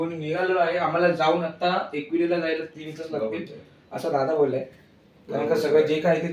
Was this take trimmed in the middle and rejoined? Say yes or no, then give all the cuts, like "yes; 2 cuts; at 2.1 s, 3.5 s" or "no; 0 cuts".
no; 0 cuts